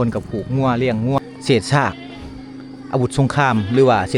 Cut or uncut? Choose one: cut